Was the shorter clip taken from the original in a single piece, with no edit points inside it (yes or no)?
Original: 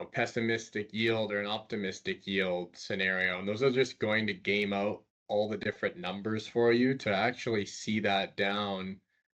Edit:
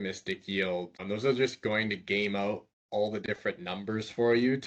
no